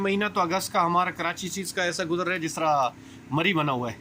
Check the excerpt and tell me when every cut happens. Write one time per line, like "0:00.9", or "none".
none